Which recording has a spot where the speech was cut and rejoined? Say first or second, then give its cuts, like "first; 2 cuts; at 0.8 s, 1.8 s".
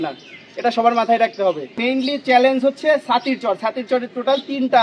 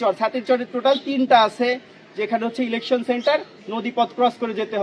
first; 1 cut; at 1.8 s